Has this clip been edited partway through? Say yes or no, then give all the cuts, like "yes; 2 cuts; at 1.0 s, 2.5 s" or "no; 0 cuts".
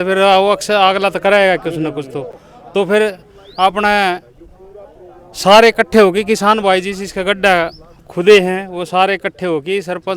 no; 0 cuts